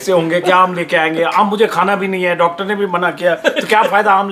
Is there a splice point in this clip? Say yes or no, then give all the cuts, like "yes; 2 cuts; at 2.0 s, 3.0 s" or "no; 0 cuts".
no; 0 cuts